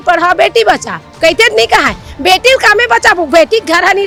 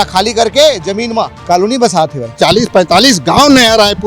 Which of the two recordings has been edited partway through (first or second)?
second